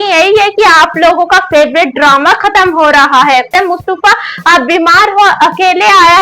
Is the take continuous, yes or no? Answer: no